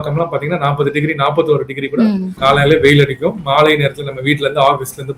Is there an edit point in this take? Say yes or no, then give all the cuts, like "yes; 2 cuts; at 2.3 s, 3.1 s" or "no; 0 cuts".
yes; 1 cut; at 2.3 s